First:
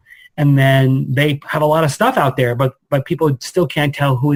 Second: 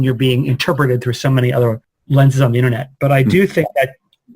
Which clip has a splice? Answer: second; 1 cut; at 1.9 s

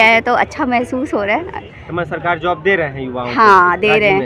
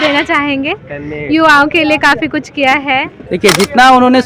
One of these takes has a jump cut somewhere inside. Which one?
second; 1 cut; at 3.2 s

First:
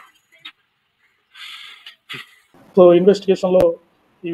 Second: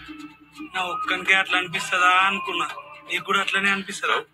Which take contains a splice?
first; 1 cut; at 2.7 s

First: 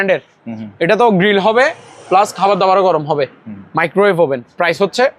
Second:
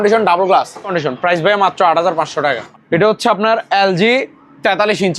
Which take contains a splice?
second; 2 cuts; at 0.9 s, 2.6 s

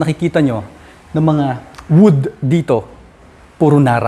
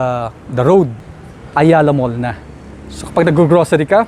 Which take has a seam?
second; 1 cut; at 1.0 s

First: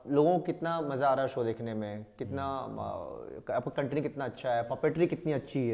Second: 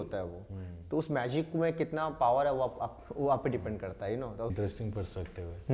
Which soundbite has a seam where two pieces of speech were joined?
second; 1 cut; at 4.5 s

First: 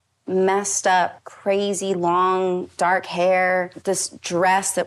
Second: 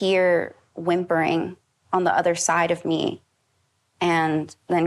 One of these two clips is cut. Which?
first; 3 cuts; at 1.3 s, 2.7 s, 3.7 s

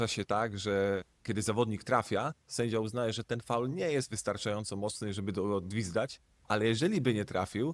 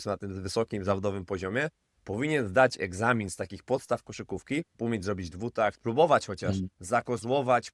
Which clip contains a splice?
second; 3 cuts; at 4.7 s, 5.8 s, 6.7 s

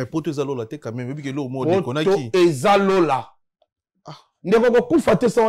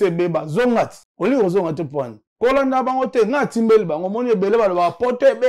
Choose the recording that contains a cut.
second; 2 cuts; at 1.0 s, 2.2 s

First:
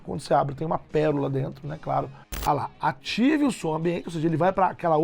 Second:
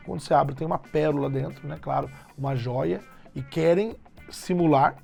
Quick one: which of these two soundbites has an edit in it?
first; 1 cut; at 2.2 s

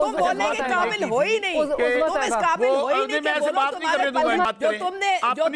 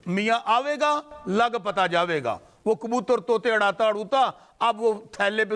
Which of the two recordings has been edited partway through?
first; 1 cut; at 4.5 s

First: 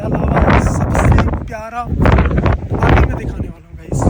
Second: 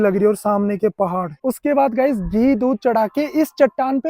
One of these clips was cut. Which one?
second; 1 cut; at 1.4 s

